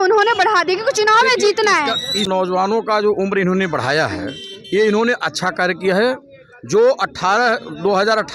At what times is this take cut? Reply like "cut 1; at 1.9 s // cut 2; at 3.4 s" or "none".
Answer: cut 1; at 2.2 s